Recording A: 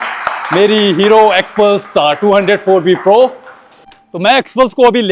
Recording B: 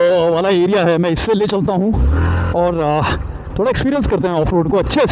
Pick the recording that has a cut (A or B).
A